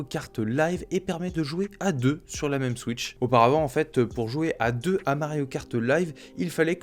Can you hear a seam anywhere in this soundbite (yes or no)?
no